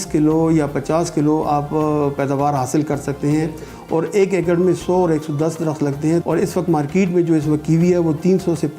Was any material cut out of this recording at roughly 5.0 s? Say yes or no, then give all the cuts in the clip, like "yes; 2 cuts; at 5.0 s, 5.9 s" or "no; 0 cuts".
no; 1 cut; at 6.2 s